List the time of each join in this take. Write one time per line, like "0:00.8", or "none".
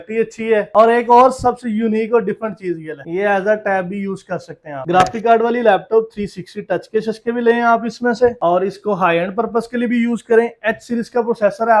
none